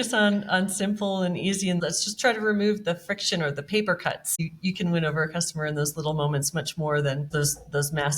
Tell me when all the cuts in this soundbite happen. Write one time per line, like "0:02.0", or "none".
0:01.8
0:04.5
0:07.3